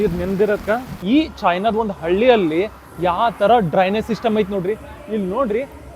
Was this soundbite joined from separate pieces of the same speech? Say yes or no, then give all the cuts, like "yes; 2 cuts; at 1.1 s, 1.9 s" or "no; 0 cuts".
yes; 1 cut; at 1.0 s